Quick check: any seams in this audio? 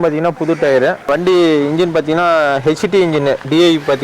yes; 1 cut; at 1.1 s

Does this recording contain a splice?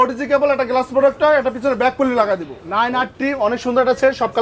yes; 1 cut; at 2.6 s

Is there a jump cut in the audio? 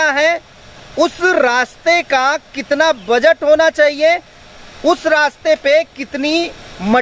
no; 0 cuts

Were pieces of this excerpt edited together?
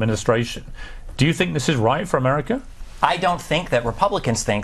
no; 0 cuts

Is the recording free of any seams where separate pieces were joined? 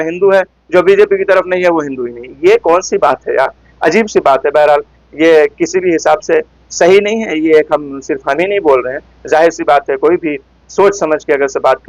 yes; 0 cuts

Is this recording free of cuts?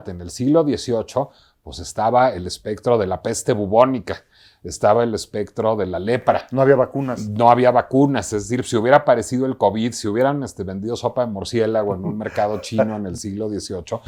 yes; 0 cuts

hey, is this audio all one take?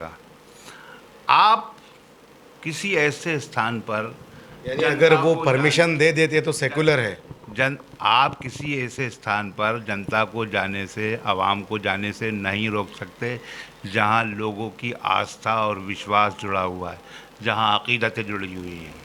yes; 0 cuts

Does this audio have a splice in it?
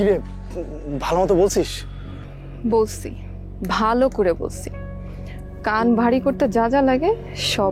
no; 0 cuts

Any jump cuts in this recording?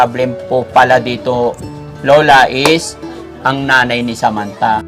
no; 0 cuts

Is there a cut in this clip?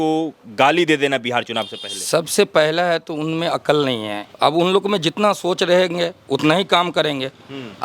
yes; 1 cut; at 4.2 s

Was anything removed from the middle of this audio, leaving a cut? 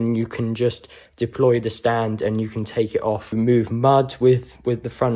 yes; 1 cut; at 3.3 s

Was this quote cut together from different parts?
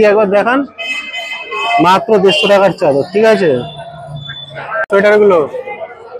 yes; 1 cut; at 4.9 s

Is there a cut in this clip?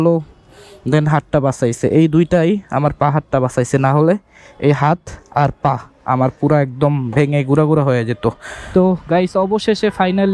yes; 1 cut; at 8.5 s

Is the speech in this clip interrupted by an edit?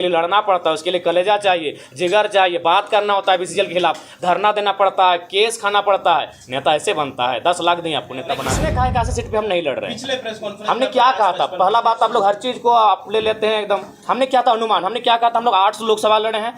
yes; 1 cut; at 8.5 s

